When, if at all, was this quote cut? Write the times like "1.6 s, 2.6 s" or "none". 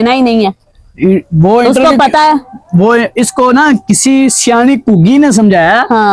none